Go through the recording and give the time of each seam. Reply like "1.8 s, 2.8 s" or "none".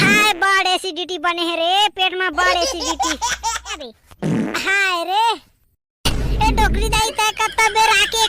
3.8 s